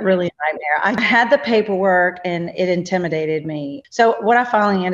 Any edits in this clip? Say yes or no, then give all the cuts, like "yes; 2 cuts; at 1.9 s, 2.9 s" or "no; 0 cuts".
yes; 2 cuts; at 1.0 s, 3.8 s